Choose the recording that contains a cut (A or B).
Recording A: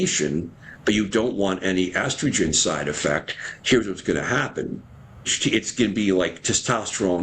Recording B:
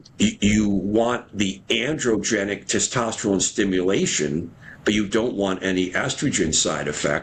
A